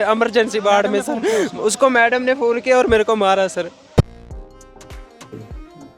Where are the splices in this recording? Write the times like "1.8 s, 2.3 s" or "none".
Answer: 4.0 s